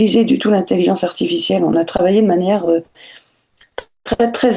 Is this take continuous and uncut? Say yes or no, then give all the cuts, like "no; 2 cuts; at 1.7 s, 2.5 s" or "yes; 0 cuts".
yes; 0 cuts